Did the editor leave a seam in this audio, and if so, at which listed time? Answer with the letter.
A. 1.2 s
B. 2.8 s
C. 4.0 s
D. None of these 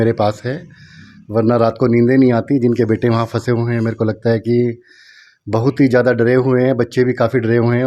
D